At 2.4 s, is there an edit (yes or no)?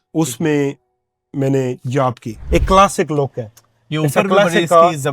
yes